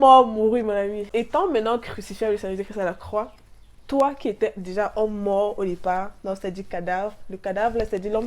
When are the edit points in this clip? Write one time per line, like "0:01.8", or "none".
0:01.1